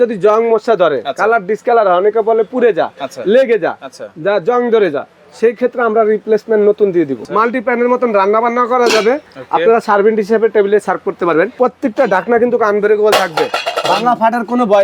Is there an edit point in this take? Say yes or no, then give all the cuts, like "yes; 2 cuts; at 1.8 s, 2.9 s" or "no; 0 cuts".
yes; 2 cuts; at 7.2 s, 11.5 s